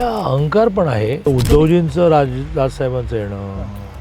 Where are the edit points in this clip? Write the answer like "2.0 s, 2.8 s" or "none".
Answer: 1.3 s